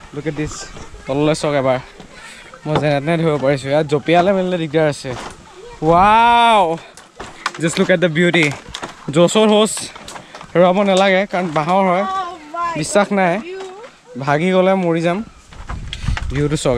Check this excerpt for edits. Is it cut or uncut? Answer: uncut